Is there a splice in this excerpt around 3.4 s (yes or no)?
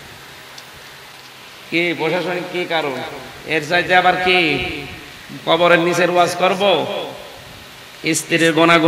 no